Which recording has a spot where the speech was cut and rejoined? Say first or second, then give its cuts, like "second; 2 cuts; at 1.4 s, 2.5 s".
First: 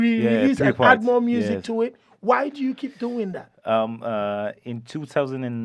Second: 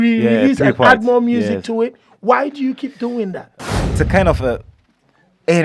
second; 1 cut; at 3.5 s